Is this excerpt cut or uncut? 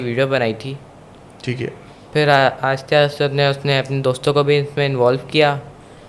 uncut